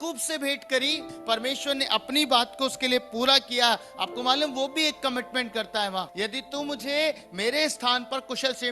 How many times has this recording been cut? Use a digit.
2